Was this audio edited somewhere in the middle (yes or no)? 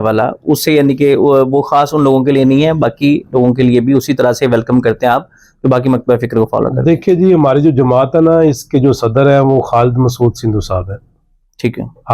no